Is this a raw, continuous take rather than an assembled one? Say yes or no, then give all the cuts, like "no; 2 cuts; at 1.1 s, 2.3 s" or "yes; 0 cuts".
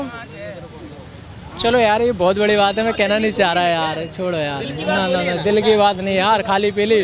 yes; 0 cuts